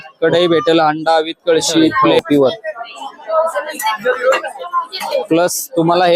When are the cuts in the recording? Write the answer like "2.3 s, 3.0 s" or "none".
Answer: 2.1 s